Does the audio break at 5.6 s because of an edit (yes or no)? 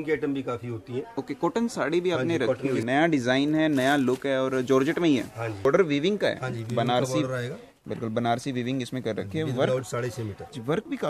yes